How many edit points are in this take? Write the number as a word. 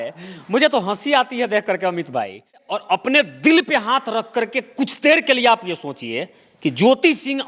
one